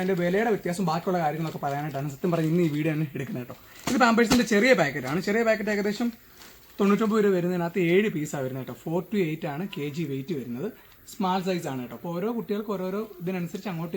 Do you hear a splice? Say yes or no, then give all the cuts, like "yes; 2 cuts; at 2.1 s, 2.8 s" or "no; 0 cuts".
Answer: no; 0 cuts